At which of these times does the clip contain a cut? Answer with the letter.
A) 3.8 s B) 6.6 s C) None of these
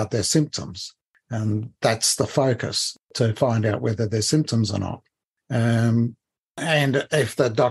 B